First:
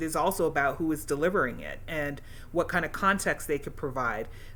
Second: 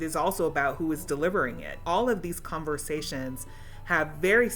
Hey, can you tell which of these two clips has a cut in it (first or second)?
second